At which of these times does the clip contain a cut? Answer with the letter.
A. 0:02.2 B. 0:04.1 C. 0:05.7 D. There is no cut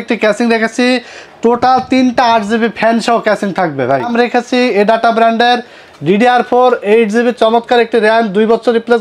B